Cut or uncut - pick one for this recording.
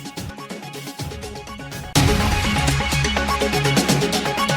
cut